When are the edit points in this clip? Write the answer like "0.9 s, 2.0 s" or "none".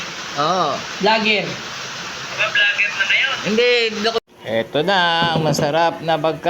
4.2 s